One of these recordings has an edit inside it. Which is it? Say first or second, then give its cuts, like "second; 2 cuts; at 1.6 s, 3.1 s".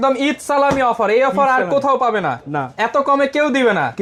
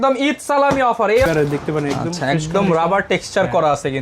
second; 1 cut; at 1.3 s